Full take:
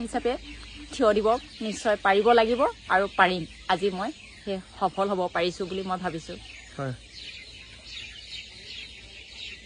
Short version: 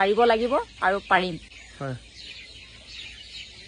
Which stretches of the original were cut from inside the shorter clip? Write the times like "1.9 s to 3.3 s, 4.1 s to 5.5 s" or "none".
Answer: 3.5 s to 6.4 s